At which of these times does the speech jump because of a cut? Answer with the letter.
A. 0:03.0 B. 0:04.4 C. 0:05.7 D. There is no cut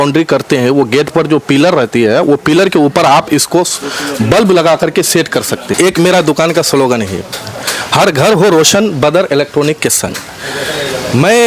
C